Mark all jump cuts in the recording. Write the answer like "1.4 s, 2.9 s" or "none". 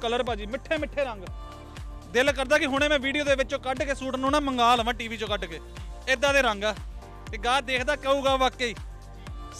none